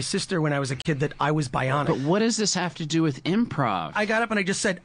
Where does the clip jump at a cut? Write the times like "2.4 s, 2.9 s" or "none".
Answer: 1.8 s, 3.9 s